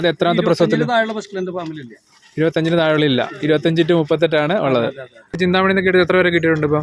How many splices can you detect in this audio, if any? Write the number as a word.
one